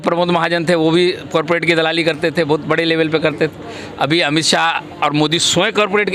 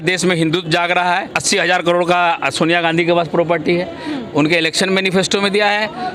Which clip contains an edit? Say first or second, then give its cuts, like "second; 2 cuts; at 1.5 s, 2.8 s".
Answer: second; 1 cut; at 1.3 s